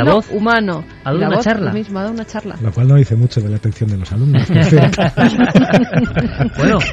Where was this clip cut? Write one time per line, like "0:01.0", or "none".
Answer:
none